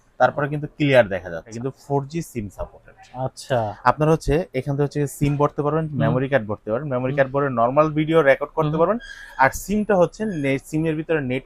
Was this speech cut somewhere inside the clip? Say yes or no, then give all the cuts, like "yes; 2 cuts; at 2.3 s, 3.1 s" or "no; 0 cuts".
yes; 1 cut; at 1.5 s